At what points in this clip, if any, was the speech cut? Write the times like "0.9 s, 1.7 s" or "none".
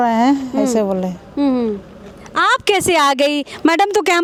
none